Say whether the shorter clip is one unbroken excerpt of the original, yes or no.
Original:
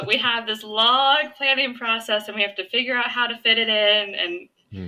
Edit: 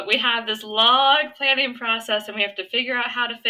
yes